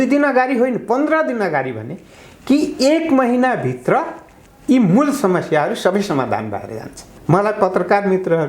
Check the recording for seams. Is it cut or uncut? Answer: cut